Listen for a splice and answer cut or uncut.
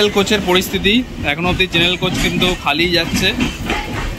uncut